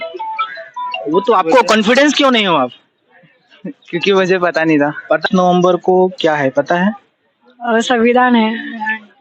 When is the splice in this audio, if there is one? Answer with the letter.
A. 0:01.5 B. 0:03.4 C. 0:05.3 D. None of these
C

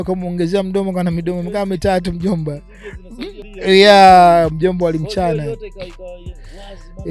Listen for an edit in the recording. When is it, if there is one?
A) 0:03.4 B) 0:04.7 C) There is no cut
A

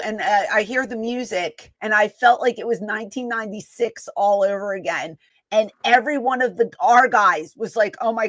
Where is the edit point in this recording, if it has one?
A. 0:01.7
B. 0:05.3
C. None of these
A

